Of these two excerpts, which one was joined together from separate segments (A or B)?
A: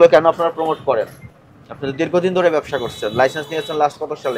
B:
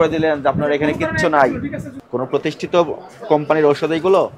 B